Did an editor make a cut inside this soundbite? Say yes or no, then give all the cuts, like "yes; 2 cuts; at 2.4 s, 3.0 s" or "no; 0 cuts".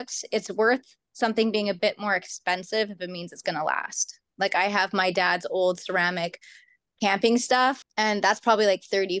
yes; 2 cuts; at 4.2 s, 7.8 s